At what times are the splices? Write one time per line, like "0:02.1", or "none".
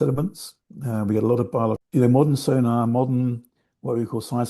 0:01.8